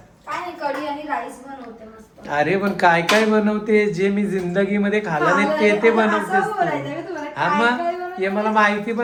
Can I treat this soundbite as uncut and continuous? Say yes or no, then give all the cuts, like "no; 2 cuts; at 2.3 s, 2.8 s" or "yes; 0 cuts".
yes; 0 cuts